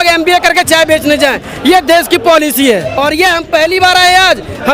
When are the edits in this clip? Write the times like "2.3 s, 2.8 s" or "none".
3.0 s